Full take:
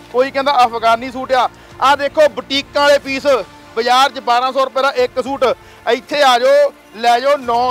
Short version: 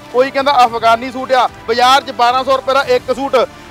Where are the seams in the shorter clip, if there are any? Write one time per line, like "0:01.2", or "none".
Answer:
0:01.6